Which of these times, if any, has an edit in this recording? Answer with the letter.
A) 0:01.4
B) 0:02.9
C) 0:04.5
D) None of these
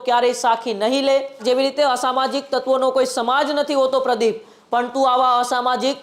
A